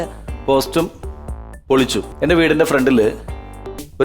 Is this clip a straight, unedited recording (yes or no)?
no